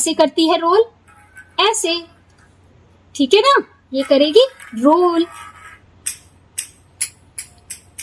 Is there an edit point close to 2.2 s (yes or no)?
no